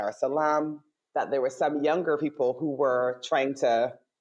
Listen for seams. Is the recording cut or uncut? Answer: uncut